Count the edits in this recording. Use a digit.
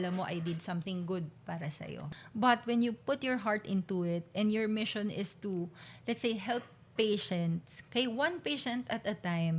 1